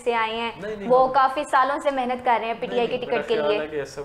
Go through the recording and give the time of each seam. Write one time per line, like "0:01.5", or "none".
none